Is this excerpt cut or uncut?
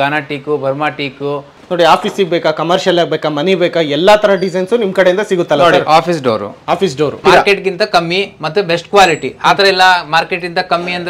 cut